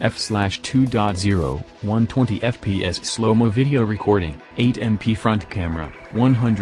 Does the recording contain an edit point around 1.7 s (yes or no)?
yes